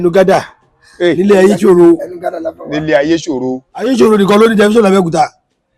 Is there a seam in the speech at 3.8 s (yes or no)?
yes